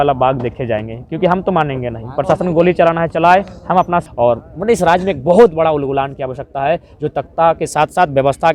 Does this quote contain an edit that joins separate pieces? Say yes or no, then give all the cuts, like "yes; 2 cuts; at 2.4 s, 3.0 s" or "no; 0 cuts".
yes; 1 cut; at 4.1 s